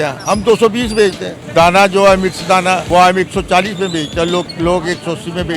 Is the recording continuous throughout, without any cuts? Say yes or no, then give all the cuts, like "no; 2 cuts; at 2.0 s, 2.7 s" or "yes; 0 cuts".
no; 3 cuts; at 1.3 s, 2.8 s, 4.5 s